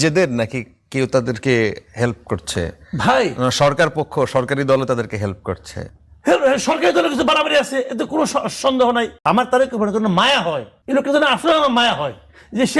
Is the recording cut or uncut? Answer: cut